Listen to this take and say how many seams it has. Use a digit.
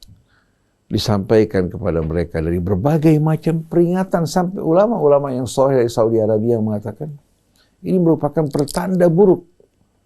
0